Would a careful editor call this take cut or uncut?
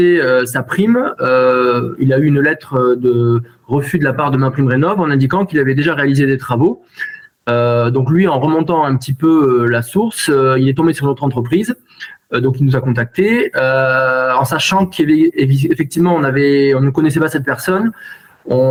uncut